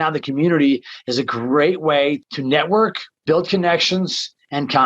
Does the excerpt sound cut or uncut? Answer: cut